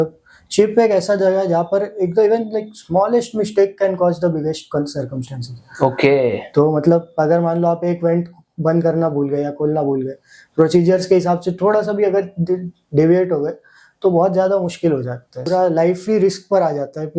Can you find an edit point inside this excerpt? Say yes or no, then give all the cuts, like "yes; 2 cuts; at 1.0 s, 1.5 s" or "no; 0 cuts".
no; 0 cuts